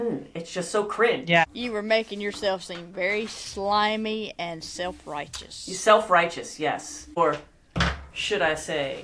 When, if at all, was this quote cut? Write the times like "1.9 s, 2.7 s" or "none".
1.4 s, 7.2 s